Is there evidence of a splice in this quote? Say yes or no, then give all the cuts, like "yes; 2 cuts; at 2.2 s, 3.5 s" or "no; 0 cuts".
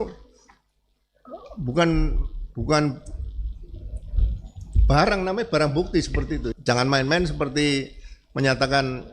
yes; 1 cut; at 6.5 s